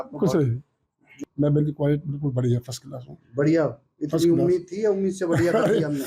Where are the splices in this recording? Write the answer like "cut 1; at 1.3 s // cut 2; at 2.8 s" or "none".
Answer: cut 1; at 1.2 s